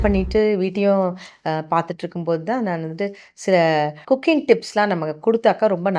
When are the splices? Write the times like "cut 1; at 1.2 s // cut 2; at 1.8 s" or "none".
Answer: none